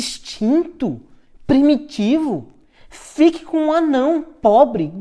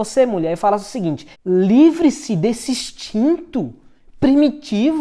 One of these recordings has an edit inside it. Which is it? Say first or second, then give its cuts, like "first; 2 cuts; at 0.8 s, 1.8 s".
second; 1 cut; at 1.3 s